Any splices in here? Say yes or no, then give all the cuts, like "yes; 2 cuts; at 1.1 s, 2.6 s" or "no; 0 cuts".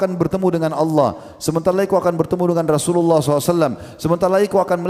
no; 0 cuts